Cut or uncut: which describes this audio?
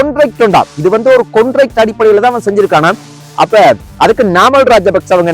cut